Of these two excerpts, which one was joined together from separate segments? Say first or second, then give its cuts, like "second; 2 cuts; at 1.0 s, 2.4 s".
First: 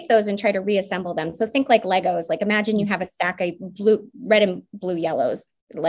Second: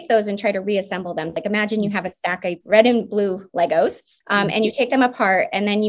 second; 3 cuts; at 1.3 s, 2.6 s, 4.1 s